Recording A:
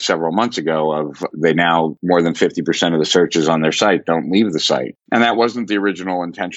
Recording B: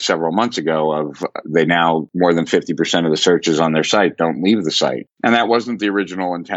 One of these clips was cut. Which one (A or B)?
A